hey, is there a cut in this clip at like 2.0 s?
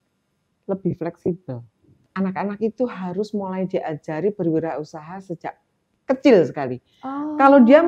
yes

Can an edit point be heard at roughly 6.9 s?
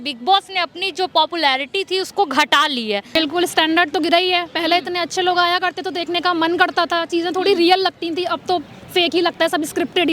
no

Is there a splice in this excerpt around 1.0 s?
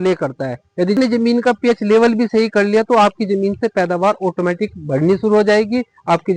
yes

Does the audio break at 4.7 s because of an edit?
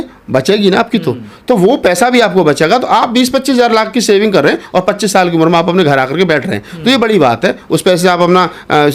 no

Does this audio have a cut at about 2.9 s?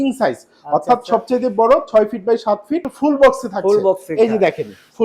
yes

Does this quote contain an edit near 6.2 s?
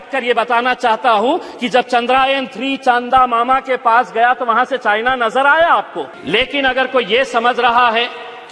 yes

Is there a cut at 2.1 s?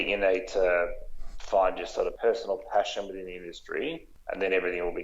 yes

